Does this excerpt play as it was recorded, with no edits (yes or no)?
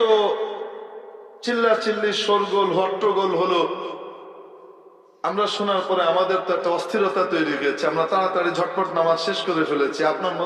yes